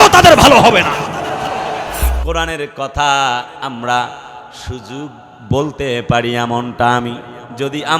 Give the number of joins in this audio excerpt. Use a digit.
1